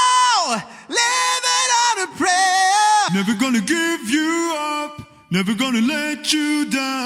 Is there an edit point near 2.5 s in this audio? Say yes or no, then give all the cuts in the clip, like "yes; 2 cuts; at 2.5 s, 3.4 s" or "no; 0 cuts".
yes; 1 cut; at 2.5 s